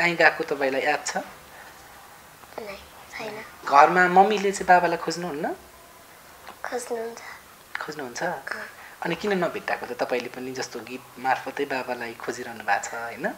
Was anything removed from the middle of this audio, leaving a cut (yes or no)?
yes